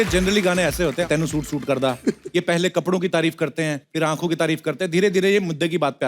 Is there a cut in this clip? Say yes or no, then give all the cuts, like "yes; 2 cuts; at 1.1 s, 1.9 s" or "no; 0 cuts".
yes; 2 cuts; at 1.1 s, 3.8 s